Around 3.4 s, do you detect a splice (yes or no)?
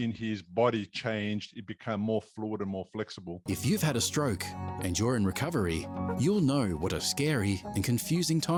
no